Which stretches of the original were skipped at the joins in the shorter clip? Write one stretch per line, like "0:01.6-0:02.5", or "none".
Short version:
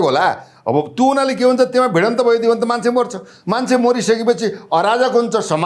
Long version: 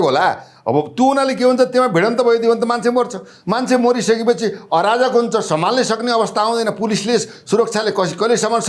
none